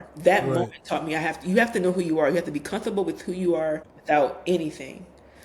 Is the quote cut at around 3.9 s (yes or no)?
yes